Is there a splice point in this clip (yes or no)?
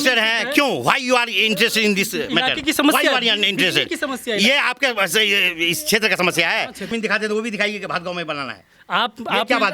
yes